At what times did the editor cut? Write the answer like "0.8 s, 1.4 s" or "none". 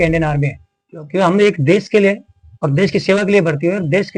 none